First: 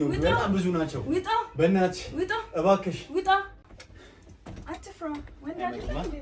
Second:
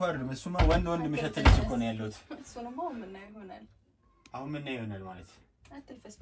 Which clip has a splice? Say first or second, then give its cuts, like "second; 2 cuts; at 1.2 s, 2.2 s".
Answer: first; 1 cut; at 3.6 s